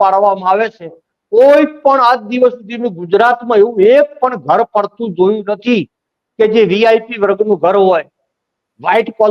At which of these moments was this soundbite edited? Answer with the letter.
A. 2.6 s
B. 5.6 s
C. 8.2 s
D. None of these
D